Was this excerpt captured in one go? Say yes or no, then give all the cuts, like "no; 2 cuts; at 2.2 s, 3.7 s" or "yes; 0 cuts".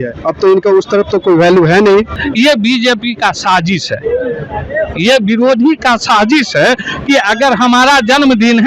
no; 1 cut; at 2.2 s